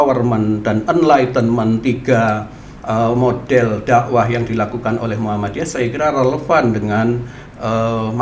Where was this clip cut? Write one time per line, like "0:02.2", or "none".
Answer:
none

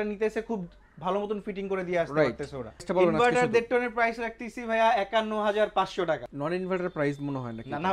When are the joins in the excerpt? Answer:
0:02.8
0:06.3

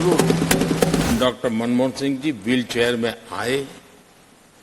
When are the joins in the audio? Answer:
0:01.1

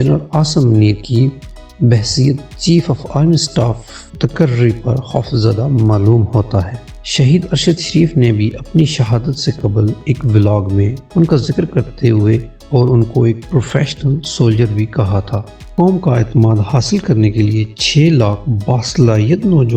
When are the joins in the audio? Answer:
0:06.9
0:12.6
0:15.7

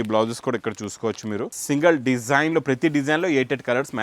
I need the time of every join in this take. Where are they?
0:01.5

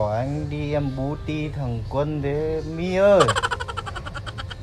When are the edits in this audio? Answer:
none

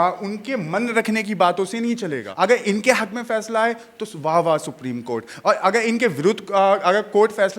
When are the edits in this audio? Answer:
0:02.2

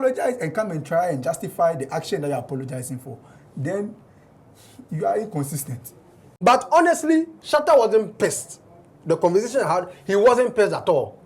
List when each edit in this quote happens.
0:06.3

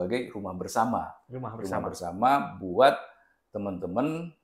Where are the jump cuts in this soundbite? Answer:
none

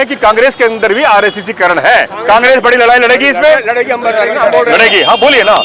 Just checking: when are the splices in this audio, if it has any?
0:02.1

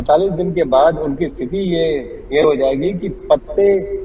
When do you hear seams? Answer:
none

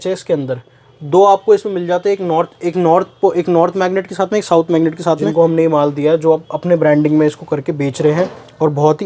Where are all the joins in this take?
0:05.2

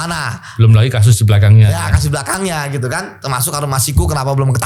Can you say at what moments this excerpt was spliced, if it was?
none

